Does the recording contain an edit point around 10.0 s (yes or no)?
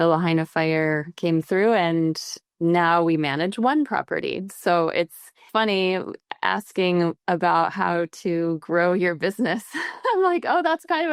no